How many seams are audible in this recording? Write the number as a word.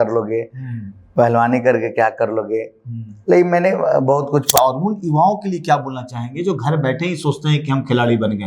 one